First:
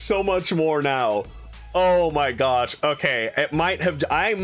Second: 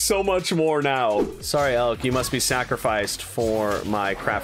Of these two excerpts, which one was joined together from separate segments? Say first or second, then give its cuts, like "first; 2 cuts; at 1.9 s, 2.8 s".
second; 1 cut; at 1.4 s